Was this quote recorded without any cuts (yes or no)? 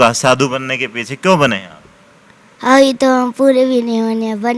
yes